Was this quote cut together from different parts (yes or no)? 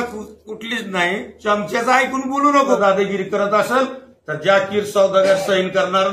yes